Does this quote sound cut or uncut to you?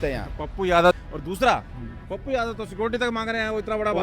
cut